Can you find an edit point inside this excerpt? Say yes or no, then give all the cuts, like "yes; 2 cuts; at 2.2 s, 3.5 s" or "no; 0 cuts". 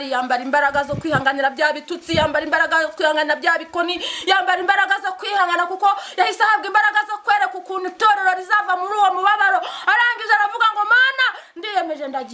no; 0 cuts